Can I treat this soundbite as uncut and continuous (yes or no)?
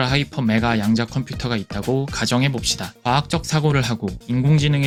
yes